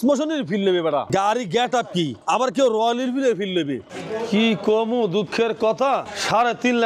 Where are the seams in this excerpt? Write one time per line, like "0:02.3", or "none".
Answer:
0:01.1
0:02.2
0:03.9